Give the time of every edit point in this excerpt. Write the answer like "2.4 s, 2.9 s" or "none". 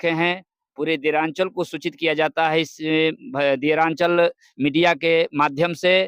none